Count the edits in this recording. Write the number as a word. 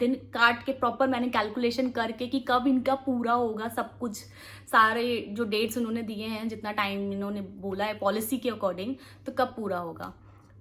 zero